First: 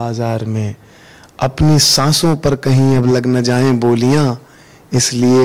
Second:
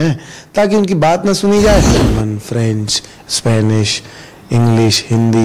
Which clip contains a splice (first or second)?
second